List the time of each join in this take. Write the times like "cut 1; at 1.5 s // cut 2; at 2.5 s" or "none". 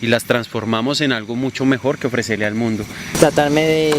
cut 1; at 3.1 s